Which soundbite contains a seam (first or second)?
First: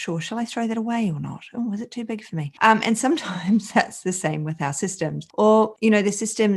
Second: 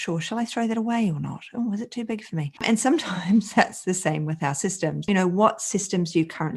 second